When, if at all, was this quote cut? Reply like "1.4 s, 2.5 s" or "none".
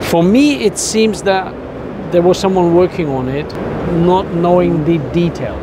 none